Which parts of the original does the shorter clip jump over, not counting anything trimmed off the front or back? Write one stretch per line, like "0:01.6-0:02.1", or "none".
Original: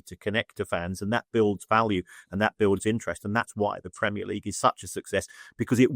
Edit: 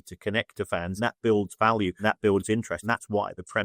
0:01.0-0:01.1
0:02.1-0:02.3
0:03.2-0:03.3